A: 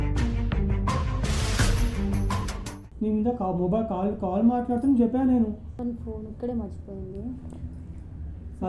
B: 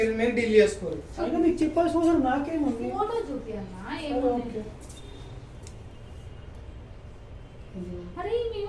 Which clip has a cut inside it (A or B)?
A